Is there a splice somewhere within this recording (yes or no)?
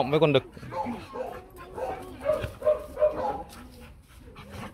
no